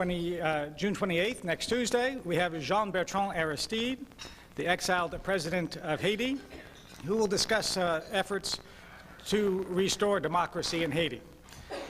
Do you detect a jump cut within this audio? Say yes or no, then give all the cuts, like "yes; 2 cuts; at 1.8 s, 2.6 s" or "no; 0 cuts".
yes; 1 cut; at 4.1 s